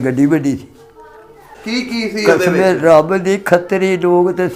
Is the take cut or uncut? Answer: cut